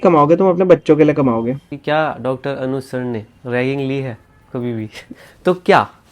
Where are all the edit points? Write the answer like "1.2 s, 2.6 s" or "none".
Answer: 1.6 s, 5.1 s